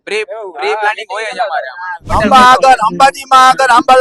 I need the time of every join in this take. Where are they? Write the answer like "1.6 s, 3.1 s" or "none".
2.0 s